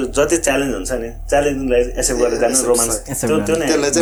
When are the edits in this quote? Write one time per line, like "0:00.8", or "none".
none